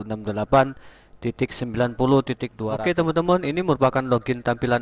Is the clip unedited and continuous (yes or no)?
no